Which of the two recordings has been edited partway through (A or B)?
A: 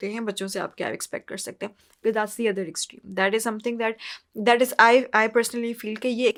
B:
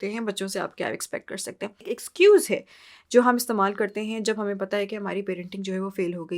B